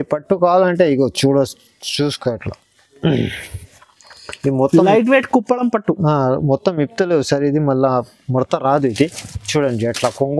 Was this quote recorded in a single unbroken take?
yes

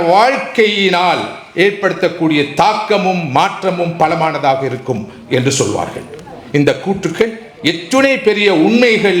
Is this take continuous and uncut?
yes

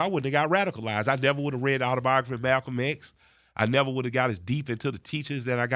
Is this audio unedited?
yes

